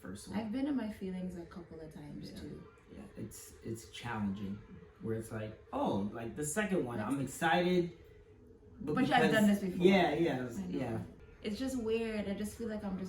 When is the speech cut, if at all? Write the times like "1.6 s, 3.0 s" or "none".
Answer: 11.1 s